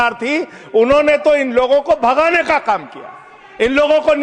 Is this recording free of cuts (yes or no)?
yes